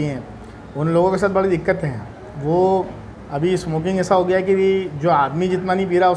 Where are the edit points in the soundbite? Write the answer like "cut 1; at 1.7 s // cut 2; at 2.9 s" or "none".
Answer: none